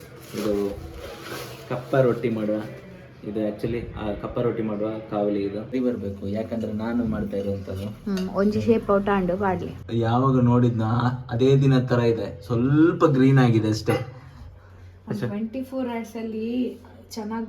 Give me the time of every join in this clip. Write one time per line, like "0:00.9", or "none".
0:05.6
0:09.8